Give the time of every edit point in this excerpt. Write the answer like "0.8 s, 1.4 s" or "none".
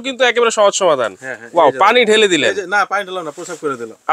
none